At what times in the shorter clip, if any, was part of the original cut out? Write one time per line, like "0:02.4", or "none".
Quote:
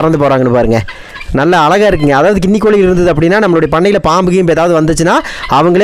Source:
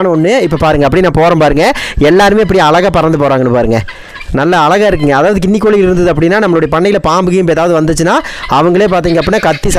none